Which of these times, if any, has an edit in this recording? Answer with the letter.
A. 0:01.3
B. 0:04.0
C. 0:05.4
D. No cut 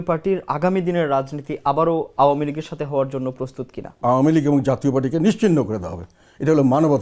B